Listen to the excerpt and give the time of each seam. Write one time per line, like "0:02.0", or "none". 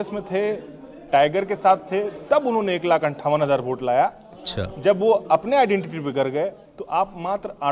0:06.7